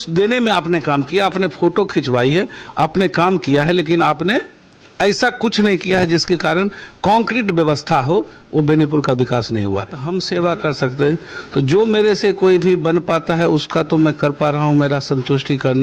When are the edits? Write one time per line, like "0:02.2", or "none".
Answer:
0:10.0